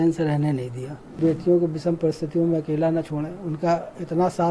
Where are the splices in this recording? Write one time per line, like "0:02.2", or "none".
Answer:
0:01.2